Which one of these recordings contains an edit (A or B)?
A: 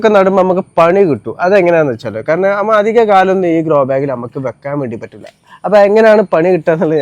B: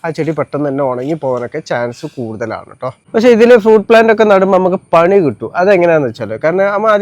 B